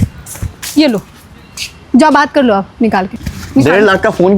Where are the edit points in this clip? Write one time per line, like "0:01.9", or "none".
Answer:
0:03.2